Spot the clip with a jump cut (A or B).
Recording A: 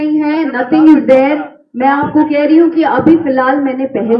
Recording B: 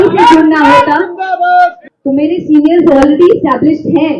B